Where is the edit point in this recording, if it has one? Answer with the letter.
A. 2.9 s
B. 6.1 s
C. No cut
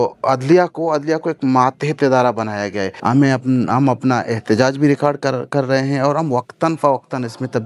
A